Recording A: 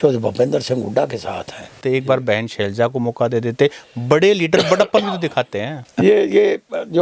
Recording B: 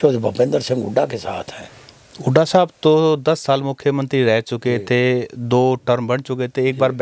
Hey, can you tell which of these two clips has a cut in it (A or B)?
A